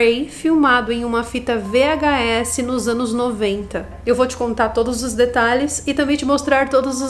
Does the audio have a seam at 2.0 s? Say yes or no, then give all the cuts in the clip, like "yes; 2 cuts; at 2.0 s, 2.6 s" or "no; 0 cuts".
no; 1 cut; at 3.9 s